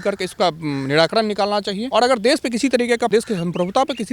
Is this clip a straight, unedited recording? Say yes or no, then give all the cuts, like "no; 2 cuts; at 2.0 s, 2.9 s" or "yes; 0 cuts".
no; 2 cuts; at 1.8 s, 3.1 s